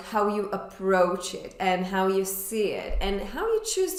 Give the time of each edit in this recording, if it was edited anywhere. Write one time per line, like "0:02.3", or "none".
none

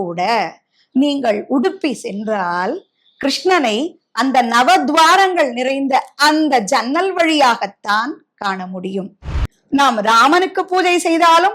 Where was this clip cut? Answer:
0:09.3

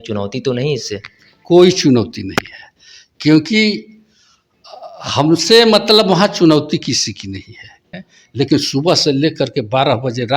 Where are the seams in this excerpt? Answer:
0:07.8

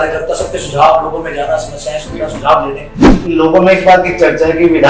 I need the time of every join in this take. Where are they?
0:03.1

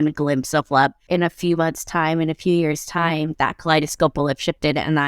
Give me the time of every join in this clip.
0:01.0

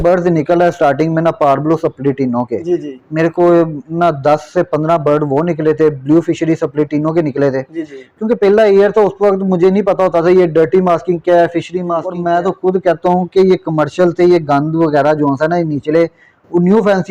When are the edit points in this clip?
0:12.1

